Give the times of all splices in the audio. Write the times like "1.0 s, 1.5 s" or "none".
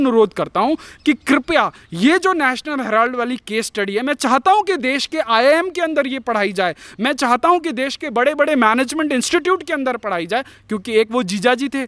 none